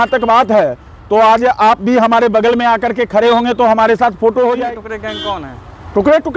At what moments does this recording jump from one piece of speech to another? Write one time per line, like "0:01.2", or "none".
0:04.6